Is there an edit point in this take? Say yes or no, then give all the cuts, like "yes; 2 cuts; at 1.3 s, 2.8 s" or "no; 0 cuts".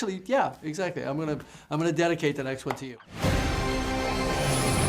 yes; 1 cut; at 3.0 s